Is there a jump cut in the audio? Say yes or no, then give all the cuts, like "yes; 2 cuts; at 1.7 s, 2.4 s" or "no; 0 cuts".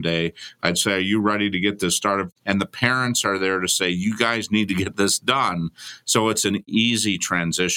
yes; 2 cuts; at 2.3 s, 6.7 s